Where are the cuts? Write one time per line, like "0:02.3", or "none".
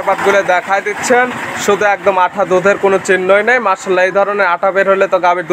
none